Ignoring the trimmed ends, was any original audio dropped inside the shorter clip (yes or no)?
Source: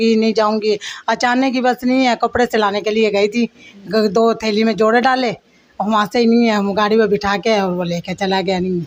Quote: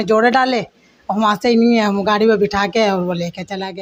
no